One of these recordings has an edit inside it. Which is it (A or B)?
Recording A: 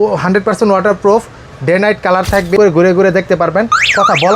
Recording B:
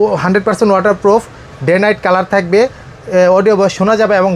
A